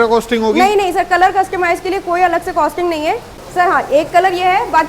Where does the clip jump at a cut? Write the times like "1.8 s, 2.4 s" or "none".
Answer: 3.4 s